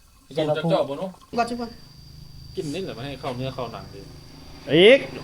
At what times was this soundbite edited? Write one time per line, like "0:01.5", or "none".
0:01.3